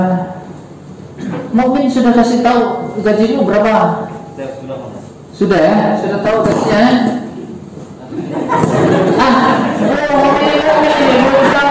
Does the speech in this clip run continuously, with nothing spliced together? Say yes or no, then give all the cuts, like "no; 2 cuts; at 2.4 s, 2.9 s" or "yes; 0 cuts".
yes; 0 cuts